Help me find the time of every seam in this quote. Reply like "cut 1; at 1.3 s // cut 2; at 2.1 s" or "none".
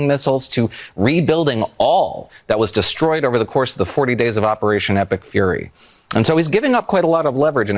none